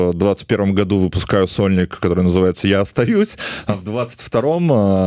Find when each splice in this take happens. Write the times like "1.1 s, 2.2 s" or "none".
none